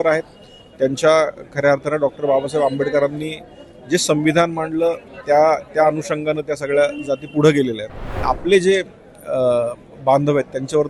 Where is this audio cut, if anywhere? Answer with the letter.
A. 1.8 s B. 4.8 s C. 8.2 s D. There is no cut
C